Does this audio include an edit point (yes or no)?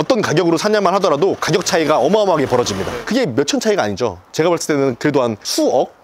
no